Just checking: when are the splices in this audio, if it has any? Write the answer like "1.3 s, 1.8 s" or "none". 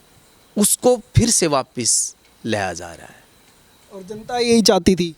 none